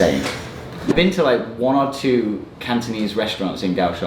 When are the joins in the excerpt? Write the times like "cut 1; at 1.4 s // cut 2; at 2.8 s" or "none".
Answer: cut 1; at 0.9 s